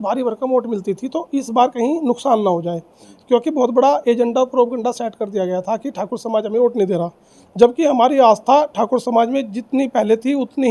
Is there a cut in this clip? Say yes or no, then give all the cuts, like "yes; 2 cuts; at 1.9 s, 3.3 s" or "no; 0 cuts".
no; 0 cuts